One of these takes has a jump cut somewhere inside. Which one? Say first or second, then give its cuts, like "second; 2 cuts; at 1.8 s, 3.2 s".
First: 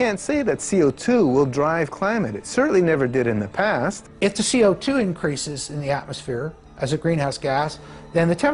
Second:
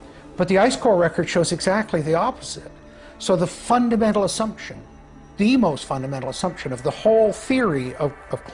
first; 1 cut; at 4.0 s